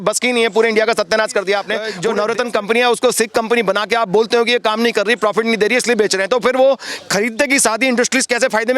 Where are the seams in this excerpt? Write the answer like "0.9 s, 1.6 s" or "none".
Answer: 1.8 s